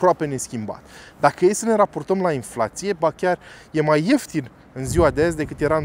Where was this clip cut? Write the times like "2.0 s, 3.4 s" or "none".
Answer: none